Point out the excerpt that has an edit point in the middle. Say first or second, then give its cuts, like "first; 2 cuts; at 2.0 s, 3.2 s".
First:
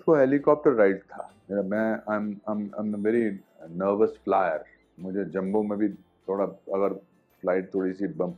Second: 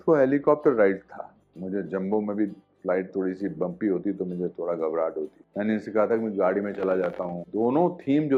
second; 4 cuts; at 1.3 s, 2.7 s, 5.4 s, 7.3 s